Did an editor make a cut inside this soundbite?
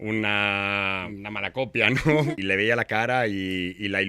yes; 2 cuts; at 1.1 s, 2.3 s

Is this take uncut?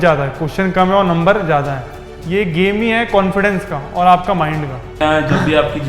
no; 2 cuts; at 1.8 s, 5.0 s

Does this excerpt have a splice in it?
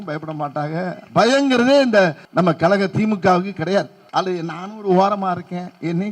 yes; 2 cuts; at 2.2 s, 4.0 s

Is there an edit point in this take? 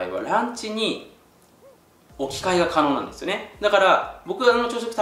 no; 0 cuts

